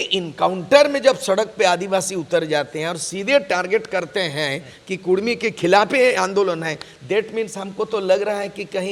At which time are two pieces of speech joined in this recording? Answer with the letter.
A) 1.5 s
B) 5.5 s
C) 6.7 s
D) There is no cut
D